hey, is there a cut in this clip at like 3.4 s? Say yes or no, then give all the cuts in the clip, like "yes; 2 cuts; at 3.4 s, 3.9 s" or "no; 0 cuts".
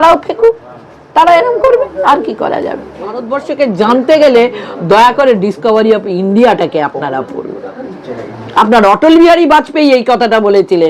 yes; 1 cut; at 3.4 s